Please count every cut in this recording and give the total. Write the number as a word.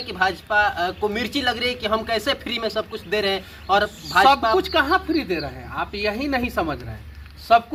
zero